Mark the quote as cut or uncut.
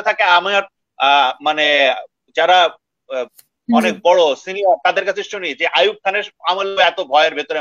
uncut